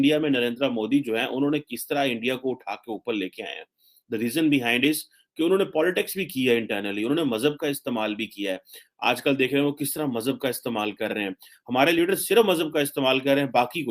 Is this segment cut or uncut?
uncut